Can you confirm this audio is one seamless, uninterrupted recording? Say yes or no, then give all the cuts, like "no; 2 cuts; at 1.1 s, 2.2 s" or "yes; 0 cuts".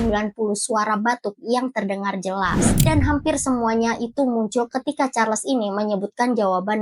no; 1 cut; at 2.7 s